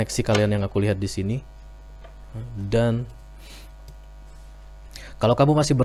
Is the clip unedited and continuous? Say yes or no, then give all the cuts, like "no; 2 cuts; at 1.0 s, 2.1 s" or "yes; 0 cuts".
yes; 0 cuts